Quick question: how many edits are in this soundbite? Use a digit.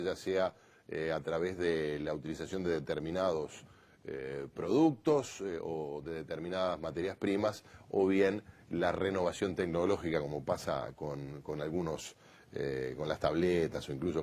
1